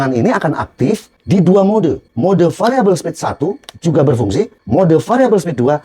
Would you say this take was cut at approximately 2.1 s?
yes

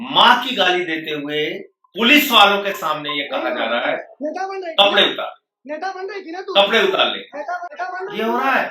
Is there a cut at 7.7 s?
yes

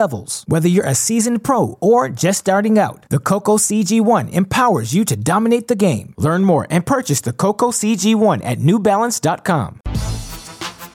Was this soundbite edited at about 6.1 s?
no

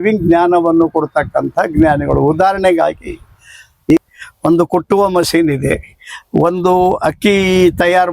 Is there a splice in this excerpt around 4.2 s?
yes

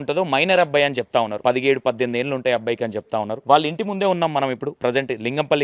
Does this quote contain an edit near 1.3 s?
yes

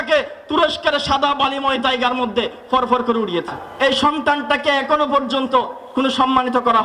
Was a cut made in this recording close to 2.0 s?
no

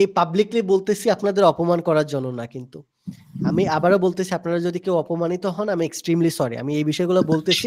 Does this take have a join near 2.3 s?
no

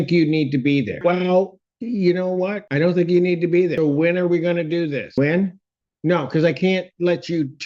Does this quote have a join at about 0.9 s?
yes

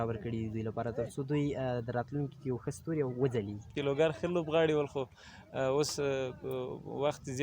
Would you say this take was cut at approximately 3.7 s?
yes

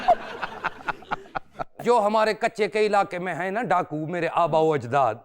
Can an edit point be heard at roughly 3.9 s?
no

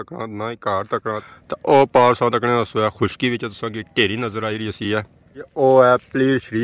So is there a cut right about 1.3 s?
yes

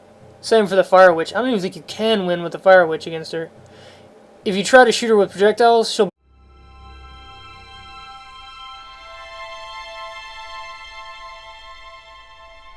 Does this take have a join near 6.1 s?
no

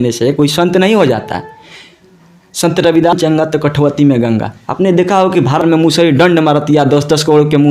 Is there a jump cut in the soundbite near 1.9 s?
no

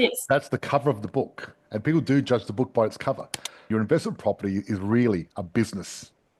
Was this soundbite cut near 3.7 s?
yes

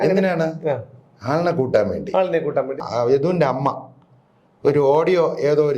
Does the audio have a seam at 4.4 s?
no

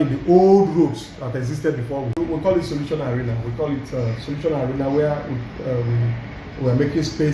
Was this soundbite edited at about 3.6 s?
no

